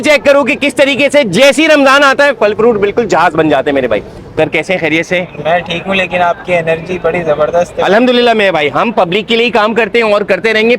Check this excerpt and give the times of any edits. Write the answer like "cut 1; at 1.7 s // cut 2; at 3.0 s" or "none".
cut 1; at 4.2 s